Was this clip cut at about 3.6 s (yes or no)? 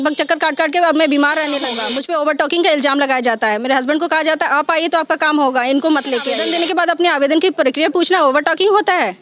no